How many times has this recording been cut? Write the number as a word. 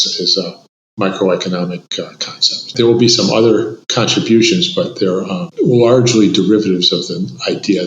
three